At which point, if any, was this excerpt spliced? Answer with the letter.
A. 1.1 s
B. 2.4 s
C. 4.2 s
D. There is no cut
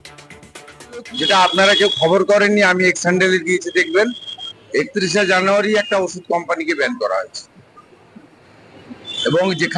A